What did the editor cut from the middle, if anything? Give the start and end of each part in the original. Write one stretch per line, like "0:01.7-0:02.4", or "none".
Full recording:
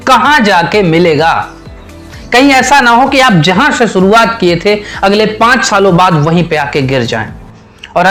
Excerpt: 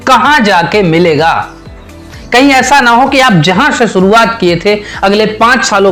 none